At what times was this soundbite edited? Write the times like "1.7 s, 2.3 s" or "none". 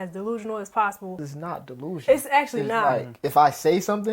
1.3 s, 3.1 s